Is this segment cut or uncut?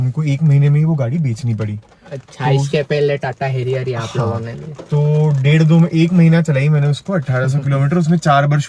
uncut